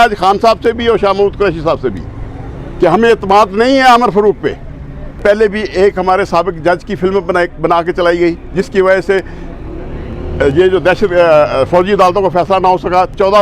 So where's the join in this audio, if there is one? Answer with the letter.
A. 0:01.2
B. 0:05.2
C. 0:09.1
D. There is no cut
B